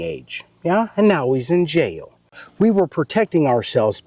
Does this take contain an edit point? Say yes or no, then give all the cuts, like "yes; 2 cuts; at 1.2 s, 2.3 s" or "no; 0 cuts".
yes; 1 cut; at 2.4 s